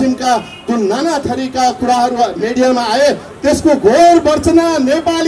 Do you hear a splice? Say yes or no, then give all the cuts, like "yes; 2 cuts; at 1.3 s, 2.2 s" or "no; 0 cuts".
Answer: no; 0 cuts